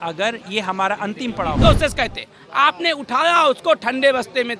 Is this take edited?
yes; 1 cut; at 1.6 s

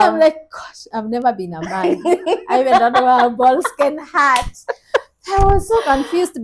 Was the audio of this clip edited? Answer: no; 0 cuts

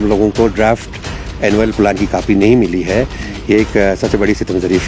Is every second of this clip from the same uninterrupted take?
yes; 0 cuts

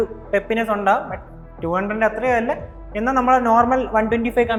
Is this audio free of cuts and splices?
yes; 0 cuts

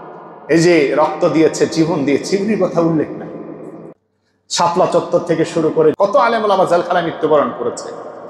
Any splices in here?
yes; 1 cut; at 6.0 s

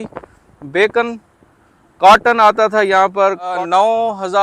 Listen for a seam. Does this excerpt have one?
yes; 1 cut; at 3.5 s

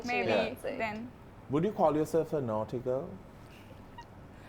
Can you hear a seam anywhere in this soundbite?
no; 0 cuts

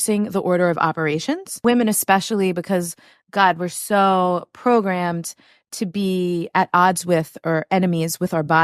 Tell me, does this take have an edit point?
yes; 1 cut; at 1.6 s

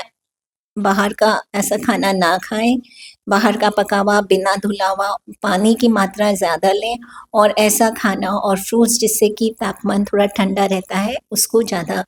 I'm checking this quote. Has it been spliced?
no; 0 cuts

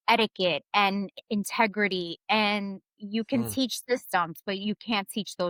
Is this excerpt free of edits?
yes; 0 cuts

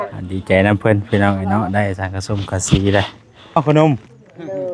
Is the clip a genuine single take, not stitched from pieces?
no; 1 cut; at 3.6 s

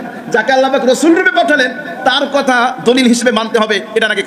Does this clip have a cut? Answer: no; 0 cuts

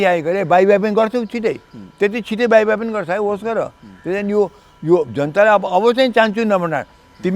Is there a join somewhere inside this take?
no; 0 cuts

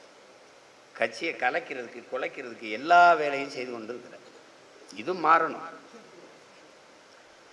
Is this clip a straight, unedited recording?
yes; 0 cuts

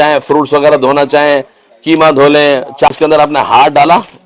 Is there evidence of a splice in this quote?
yes; 1 cut; at 2.9 s

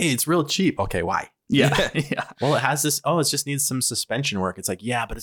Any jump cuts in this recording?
yes; 1 cut; at 2.3 s

